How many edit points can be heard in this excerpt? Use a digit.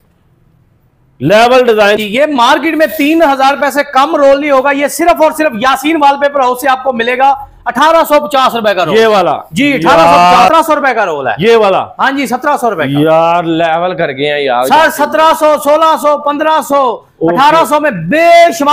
2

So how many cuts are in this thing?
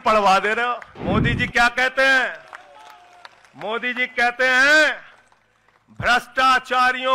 1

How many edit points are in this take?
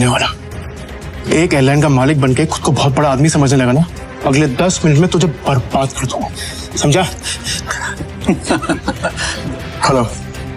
2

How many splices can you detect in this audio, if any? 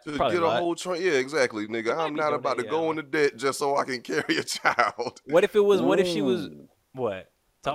0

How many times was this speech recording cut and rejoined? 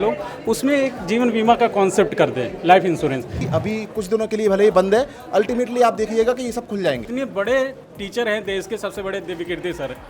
2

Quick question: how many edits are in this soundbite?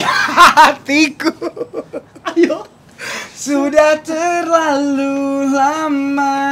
0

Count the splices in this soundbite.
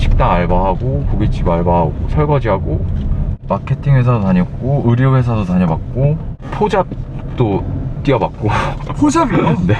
1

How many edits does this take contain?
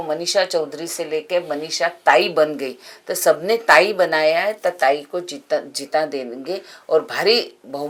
0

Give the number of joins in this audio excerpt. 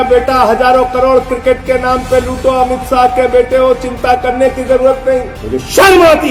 1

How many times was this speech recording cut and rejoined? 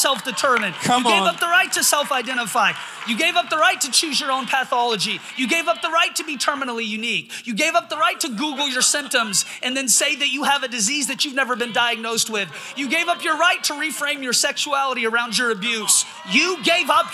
0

